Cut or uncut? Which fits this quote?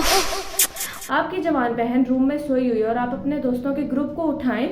cut